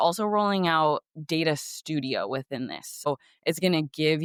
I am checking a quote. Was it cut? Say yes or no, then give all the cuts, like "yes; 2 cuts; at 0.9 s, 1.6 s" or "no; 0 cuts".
no; 0 cuts